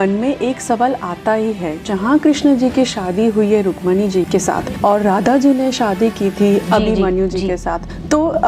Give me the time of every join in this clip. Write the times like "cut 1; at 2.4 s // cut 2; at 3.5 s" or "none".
cut 1; at 4.3 s // cut 2; at 6.6 s